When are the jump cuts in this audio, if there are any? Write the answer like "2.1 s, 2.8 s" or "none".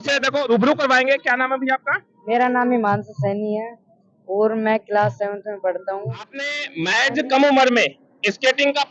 6.7 s